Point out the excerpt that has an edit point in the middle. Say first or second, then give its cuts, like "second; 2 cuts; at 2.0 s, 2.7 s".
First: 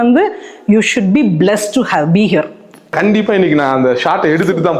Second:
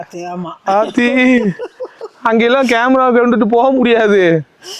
first; 1 cut; at 3.0 s